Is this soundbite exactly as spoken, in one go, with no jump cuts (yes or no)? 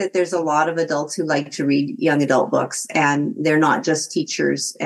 yes